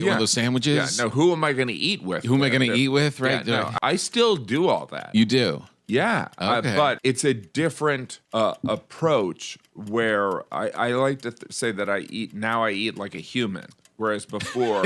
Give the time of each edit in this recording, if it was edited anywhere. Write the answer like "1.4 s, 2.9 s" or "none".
3.8 s, 7.0 s, 8.1 s